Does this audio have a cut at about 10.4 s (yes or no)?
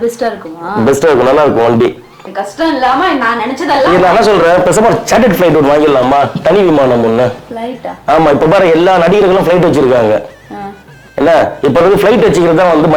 no